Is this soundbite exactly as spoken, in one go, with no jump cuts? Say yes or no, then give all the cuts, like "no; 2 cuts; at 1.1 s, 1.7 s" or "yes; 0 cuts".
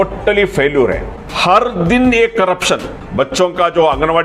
no; 2 cuts; at 1.1 s, 3.0 s